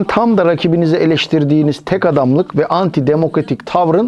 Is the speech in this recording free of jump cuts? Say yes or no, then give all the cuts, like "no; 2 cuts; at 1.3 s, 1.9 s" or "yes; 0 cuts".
yes; 0 cuts